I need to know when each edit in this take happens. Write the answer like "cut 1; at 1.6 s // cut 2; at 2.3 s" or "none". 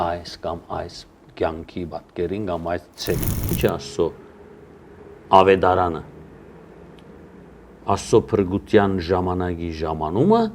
cut 1; at 3.5 s